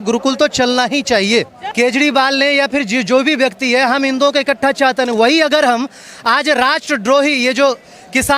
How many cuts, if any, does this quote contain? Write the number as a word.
one